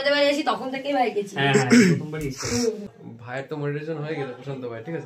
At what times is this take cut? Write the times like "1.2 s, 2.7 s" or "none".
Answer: 3.0 s